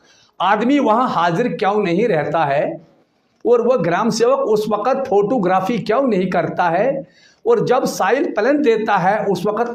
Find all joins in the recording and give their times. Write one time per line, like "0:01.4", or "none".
none